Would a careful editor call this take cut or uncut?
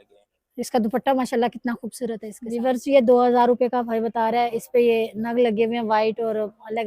cut